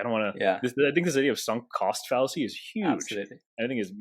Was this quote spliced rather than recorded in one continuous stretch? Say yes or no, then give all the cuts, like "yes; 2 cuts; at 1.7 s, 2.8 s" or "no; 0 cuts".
no; 0 cuts